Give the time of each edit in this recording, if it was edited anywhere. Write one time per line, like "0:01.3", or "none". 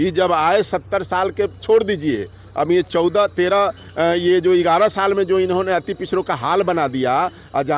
none

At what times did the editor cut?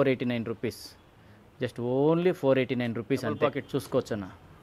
none

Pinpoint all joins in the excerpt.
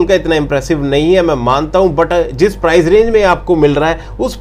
none

